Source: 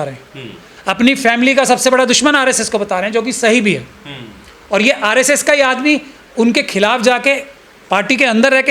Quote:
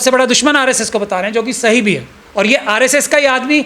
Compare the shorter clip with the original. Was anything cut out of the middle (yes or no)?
yes